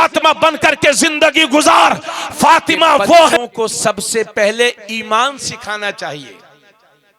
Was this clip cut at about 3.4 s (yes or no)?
yes